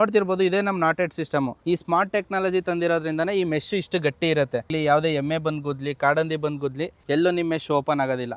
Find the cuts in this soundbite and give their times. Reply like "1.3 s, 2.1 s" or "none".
1.6 s, 4.7 s, 6.9 s